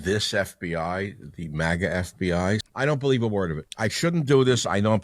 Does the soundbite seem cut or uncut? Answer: cut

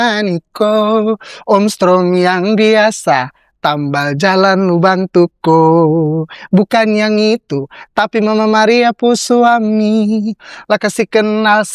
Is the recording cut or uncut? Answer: uncut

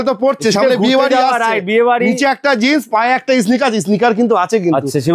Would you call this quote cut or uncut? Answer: uncut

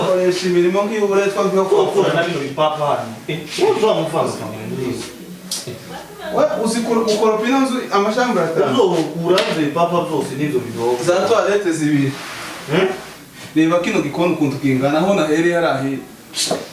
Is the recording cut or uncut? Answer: uncut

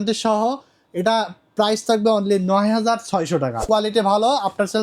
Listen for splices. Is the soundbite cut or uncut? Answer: cut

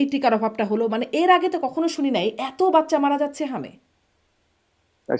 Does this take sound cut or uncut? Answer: uncut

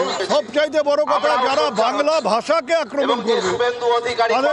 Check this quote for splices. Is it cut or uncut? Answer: uncut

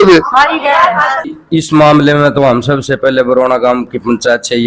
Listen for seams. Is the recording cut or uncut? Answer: cut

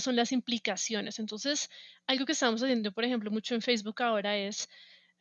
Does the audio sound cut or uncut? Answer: uncut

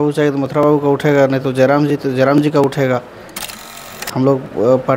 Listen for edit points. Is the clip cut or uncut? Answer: cut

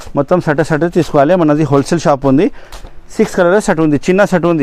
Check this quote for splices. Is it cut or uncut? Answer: uncut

